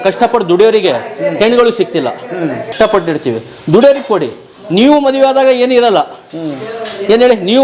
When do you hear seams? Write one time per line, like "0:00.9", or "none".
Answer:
0:02.7

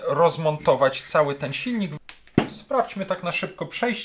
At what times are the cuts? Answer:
0:01.9

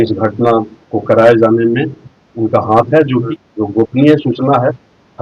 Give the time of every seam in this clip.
0:03.4

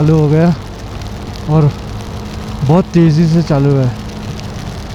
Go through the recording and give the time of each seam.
none

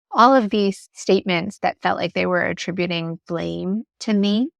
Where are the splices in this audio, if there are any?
none

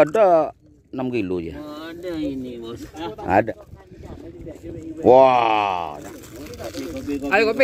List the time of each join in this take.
0:03.5
0:06.0

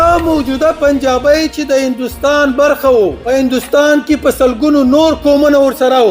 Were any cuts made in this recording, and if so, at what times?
0:03.2

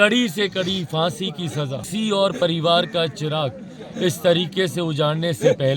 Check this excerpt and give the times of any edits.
0:01.8

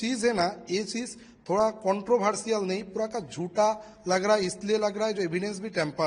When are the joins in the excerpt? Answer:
none

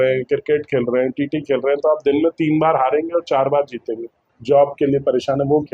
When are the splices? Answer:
0:04.3

